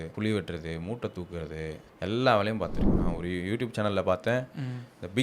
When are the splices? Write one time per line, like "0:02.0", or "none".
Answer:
0:02.9